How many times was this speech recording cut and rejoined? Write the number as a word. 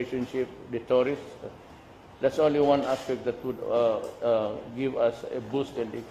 one